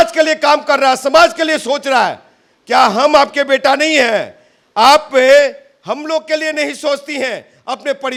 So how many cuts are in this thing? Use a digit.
0